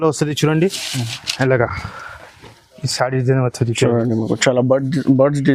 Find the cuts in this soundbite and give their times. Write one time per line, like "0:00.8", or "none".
none

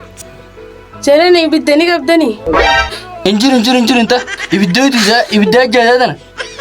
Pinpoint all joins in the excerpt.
none

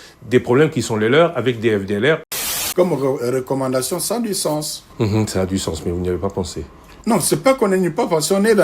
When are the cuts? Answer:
0:02.6

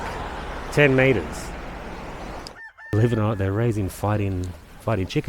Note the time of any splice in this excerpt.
0:02.5

